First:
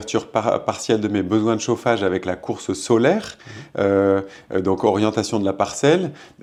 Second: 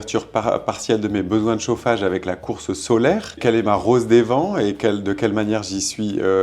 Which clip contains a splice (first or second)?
second